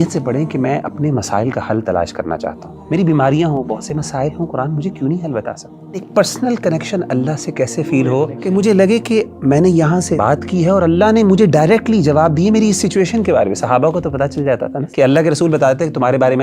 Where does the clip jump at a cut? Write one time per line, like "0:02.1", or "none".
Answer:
0:02.7
0:06.1
0:08.4
0:10.2
0:14.8